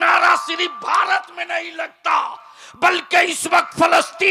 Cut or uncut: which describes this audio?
uncut